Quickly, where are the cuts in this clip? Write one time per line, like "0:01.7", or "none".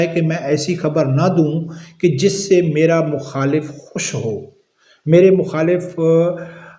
none

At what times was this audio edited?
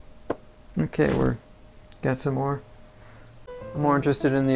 0:03.5

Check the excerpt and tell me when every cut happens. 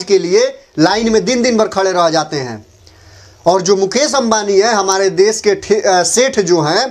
none

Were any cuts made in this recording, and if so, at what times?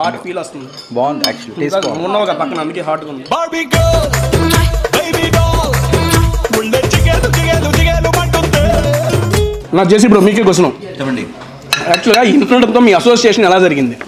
none

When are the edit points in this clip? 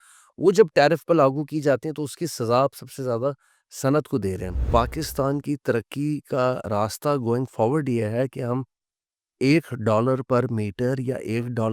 0:04.6

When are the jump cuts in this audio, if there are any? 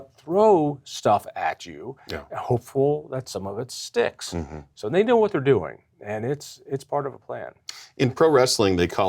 0:04.6

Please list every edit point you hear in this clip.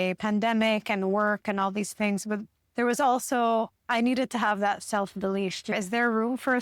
0:05.7

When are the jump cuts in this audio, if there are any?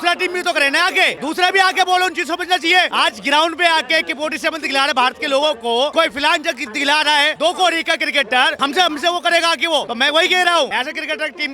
0:01.2
0:02.9
0:05.9
0:07.3
0:08.5
0:09.9
0:10.7

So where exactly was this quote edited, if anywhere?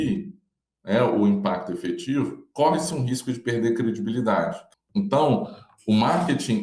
0:04.6

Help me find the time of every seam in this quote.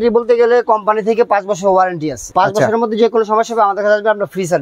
0:02.2

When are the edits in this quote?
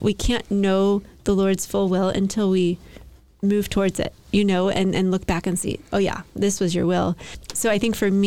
0:04.2

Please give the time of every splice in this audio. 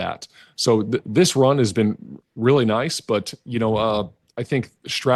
none

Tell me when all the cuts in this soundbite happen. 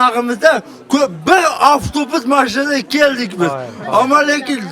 none

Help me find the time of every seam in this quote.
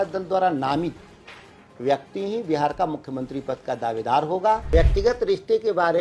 0:04.7

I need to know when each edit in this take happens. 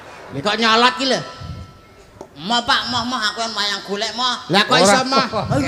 none

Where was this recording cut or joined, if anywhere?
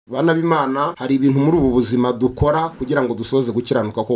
0:00.9

